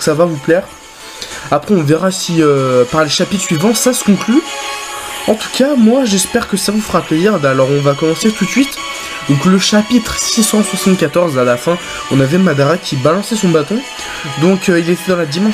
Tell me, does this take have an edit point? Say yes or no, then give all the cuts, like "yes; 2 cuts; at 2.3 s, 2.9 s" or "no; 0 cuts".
yes; 1 cut; at 10.2 s